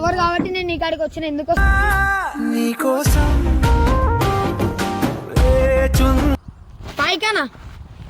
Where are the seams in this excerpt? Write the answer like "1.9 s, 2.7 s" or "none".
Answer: 1.6 s, 6.4 s